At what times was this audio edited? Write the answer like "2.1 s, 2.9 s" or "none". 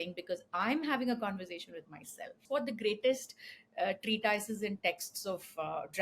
2.4 s

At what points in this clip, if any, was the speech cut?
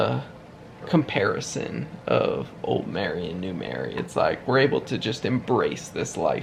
none

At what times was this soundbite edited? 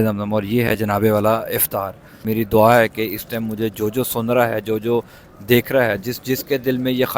2.2 s

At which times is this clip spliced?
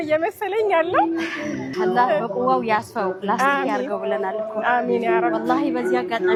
none

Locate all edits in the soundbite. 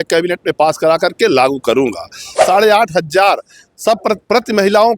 2.4 s

